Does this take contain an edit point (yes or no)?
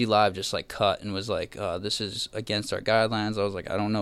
no